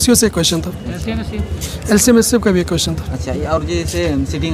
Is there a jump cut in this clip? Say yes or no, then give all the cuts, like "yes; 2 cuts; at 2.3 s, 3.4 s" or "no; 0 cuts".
no; 0 cuts